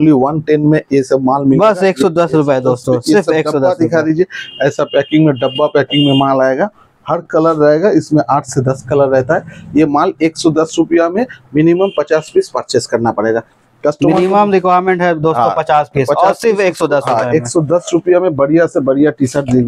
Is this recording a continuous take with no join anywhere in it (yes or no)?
yes